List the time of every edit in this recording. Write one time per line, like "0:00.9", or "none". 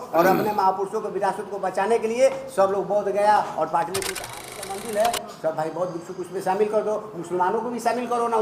0:04.2

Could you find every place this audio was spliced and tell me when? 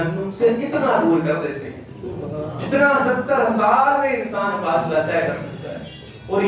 none

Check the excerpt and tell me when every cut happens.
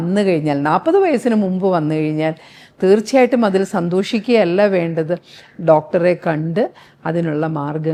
none

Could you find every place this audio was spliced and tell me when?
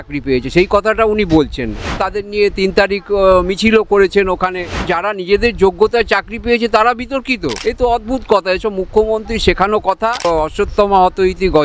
0:02.1
0:04.9
0:07.5
0:10.3

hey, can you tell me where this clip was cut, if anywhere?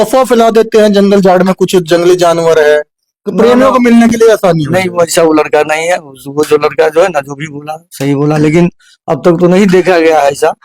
none

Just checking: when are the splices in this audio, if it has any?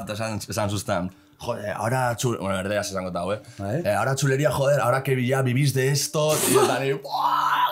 none

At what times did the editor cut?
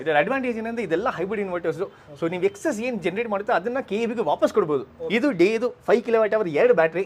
0:05.0

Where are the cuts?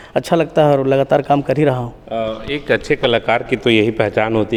none

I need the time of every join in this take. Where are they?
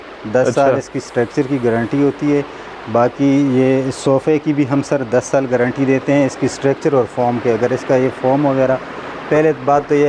none

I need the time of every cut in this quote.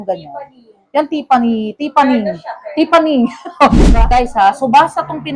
0:04.0

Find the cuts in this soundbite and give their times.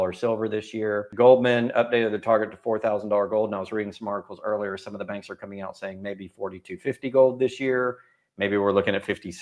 0:01.1

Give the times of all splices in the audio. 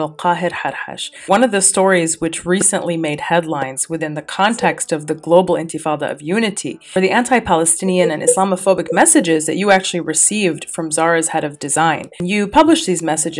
0:01.1

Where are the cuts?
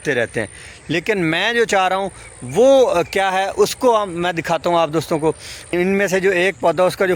0:05.5

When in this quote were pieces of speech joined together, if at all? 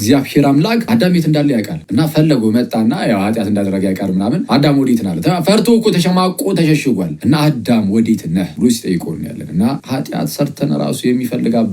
0:00.9
0:01.8
0:04.4
0:07.1
0:08.5
0:09.8

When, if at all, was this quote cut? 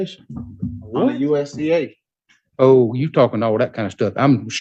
none

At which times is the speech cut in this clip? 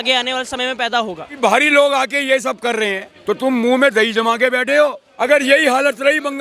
0:01.4
0:03.1
0:05.1

